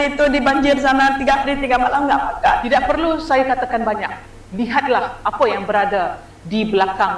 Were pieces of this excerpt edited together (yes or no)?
no